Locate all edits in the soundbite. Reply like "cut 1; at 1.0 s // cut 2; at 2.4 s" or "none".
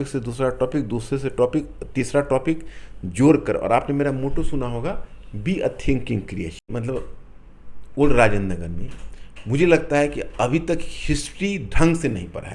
cut 1; at 6.7 s